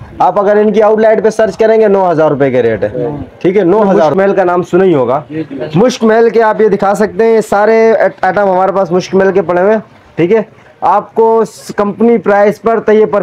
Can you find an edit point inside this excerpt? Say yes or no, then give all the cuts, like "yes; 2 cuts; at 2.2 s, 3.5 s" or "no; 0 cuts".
yes; 1 cut; at 4.1 s